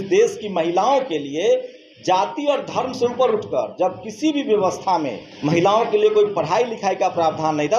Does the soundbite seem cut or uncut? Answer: cut